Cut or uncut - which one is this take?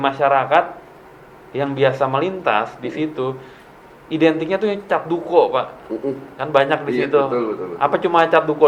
uncut